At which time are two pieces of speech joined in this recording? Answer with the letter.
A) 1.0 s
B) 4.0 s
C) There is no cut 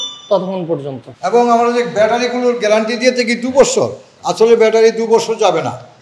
A